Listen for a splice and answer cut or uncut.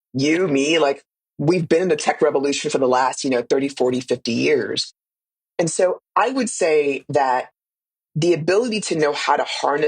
uncut